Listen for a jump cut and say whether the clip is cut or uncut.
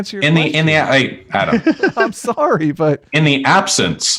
uncut